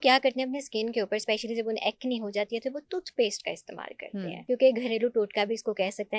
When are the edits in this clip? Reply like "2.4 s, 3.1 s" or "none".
4.4 s